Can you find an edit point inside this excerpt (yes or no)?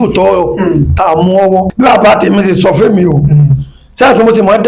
yes